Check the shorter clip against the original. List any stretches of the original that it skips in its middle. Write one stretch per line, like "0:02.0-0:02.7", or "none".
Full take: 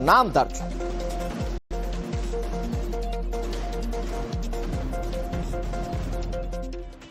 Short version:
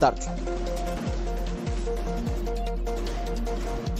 0:01.6-0:01.7